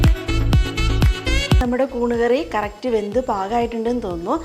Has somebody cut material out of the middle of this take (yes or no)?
yes